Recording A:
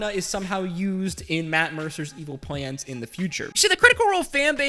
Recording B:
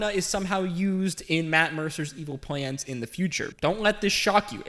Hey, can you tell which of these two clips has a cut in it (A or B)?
A